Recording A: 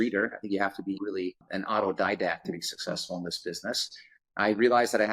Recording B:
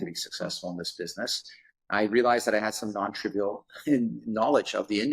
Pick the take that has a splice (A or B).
A